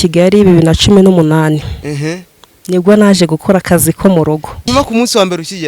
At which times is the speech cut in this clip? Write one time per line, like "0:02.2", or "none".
0:04.7

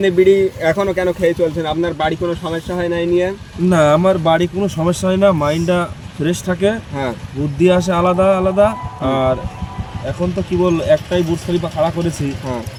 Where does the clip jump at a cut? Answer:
none

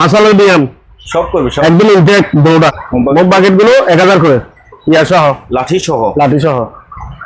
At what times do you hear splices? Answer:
0:02.8

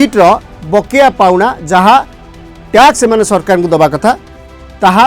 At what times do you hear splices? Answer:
none

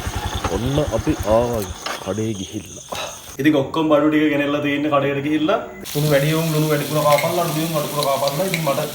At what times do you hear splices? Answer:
0:03.2
0:05.8

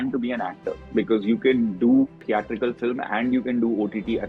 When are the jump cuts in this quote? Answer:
0:02.2

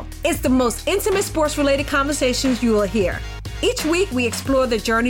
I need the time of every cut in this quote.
none

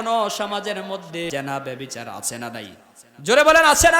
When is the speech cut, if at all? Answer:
0:01.3

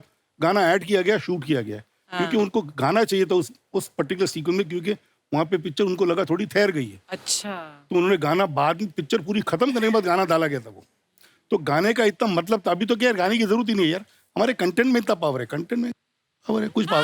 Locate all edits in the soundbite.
none

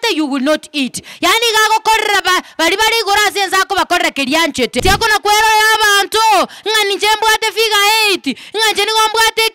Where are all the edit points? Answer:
0:04.8

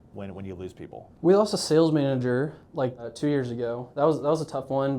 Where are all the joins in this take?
0:01.0
0:02.8

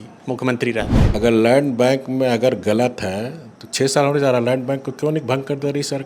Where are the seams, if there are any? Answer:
0:01.0

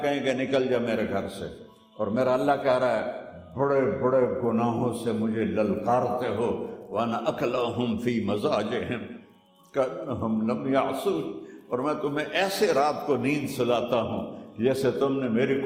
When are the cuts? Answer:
none

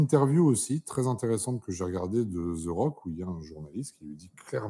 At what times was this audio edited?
none

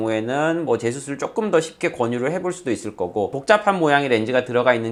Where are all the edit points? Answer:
none

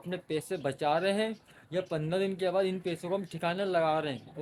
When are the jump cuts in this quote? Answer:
none

